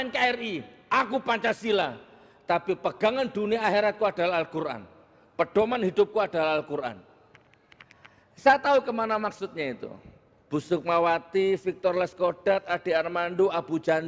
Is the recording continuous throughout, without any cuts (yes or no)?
yes